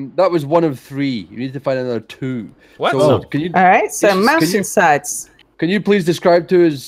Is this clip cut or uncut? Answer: uncut